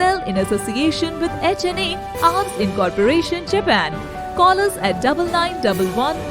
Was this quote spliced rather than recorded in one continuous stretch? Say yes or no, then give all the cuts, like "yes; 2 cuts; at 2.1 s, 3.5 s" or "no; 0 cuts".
no; 0 cuts